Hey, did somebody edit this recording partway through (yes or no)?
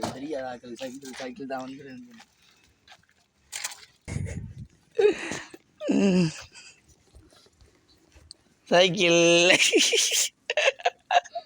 yes